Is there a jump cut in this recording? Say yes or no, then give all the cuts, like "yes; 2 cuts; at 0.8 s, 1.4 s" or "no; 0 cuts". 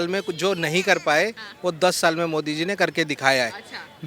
no; 0 cuts